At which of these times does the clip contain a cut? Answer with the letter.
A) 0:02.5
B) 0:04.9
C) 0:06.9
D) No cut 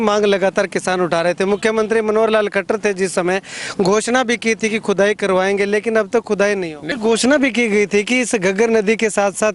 C